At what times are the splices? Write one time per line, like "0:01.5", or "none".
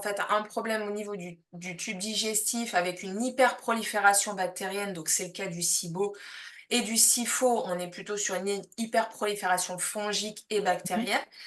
none